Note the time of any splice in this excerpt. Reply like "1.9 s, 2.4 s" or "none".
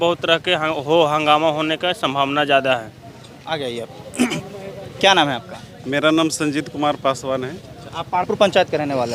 none